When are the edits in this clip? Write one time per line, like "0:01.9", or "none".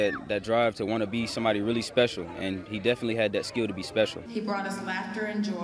0:04.2